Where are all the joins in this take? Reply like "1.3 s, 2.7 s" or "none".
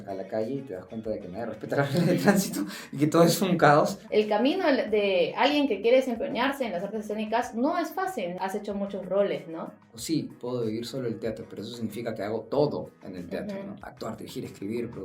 4.0 s, 8.4 s, 9.9 s, 13.8 s